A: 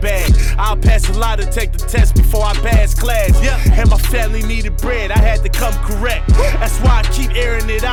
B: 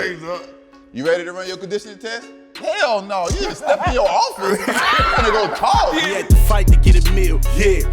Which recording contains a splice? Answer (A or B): B